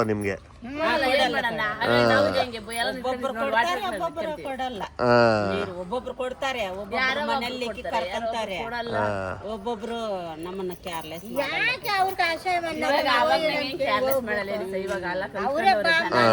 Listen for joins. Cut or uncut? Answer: uncut